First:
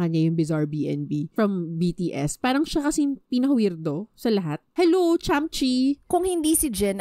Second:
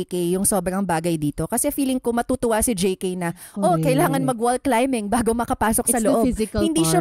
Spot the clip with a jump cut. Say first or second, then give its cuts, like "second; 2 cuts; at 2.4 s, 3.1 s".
first; 3 cuts; at 1.3 s, 4.6 s, 6.1 s